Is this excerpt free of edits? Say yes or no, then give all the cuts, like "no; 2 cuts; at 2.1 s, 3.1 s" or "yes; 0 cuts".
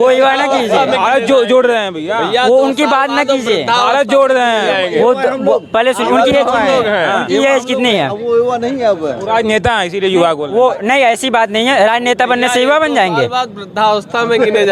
yes; 0 cuts